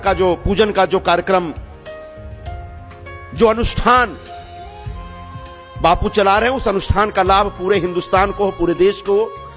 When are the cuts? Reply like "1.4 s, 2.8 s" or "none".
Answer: none